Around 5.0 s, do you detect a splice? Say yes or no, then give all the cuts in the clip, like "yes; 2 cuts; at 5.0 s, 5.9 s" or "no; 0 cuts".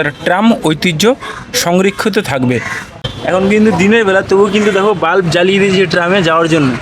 no; 1 cut; at 3.1 s